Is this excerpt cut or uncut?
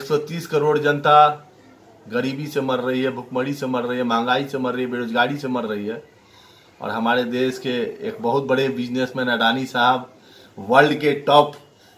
uncut